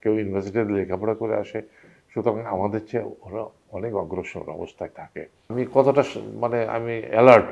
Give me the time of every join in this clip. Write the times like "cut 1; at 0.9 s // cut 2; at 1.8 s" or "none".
cut 1; at 5.5 s